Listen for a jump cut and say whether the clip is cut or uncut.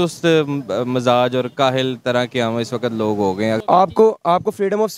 cut